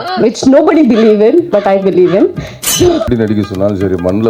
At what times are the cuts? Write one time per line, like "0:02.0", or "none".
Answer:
0:03.0